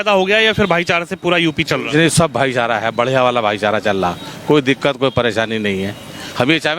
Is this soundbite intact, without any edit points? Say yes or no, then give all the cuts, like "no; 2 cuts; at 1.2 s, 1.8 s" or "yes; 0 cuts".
yes; 0 cuts